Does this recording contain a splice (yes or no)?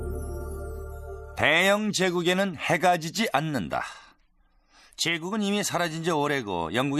yes